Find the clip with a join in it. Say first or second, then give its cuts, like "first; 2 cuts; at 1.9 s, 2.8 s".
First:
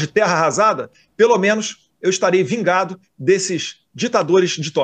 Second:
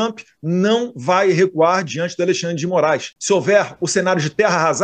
second; 1 cut; at 3.1 s